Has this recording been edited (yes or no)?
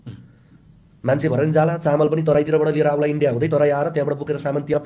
yes